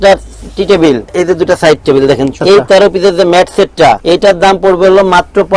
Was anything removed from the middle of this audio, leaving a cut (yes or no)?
yes